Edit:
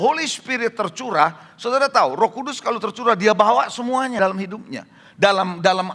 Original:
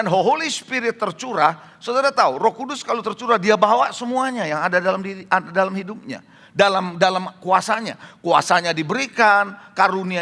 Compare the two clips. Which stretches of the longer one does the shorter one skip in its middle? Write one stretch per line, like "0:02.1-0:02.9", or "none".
0:04.4-0:05.5